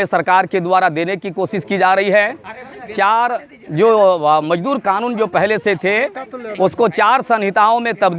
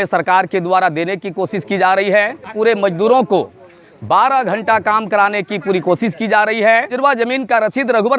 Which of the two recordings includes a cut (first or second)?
second